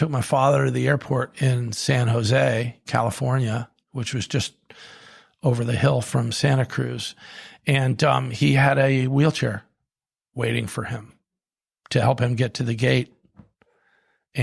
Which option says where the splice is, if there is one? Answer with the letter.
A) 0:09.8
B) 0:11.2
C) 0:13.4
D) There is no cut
D